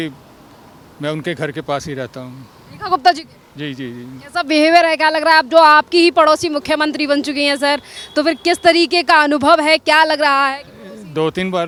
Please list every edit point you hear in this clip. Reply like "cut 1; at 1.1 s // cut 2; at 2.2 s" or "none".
none